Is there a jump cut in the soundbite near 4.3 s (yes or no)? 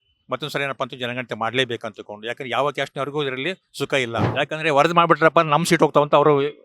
yes